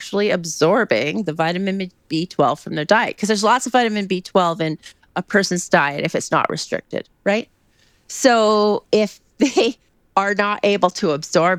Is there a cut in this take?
no; 0 cuts

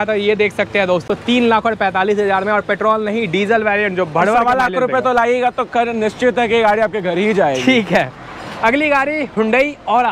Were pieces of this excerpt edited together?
no; 0 cuts

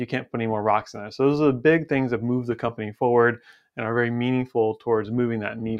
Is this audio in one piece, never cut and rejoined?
yes; 0 cuts

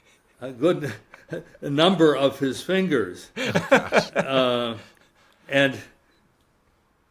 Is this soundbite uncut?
yes; 0 cuts

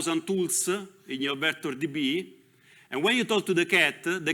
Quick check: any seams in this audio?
no; 0 cuts

